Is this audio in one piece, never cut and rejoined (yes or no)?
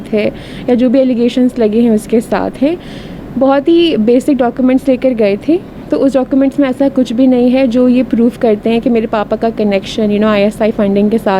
yes